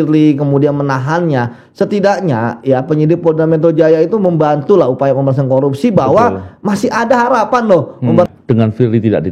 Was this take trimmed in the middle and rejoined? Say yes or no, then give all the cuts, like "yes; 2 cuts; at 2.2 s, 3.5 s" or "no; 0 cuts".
yes; 1 cut; at 8.3 s